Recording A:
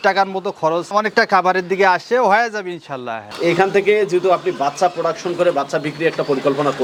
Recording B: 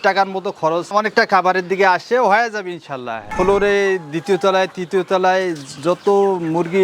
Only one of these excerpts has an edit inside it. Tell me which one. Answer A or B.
B